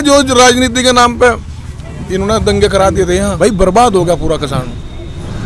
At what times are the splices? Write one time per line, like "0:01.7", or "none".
0:03.3